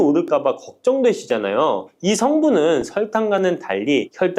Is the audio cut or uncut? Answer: uncut